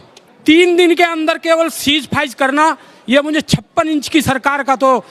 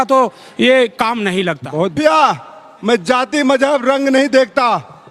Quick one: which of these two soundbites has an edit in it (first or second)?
second